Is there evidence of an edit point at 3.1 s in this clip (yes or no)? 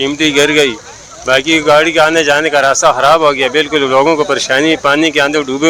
no